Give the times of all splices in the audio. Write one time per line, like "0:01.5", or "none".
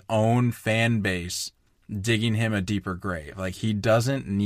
none